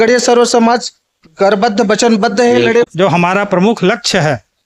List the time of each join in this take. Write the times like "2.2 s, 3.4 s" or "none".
2.8 s

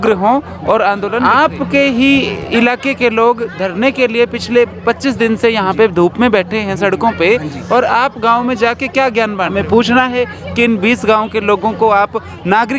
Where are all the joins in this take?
1.2 s, 9.5 s

